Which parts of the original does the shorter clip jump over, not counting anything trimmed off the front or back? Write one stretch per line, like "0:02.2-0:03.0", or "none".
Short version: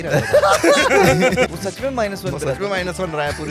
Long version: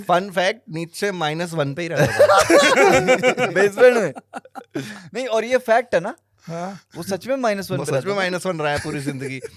0:03.4-0:07.0